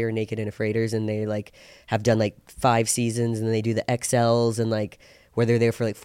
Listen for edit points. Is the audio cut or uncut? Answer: uncut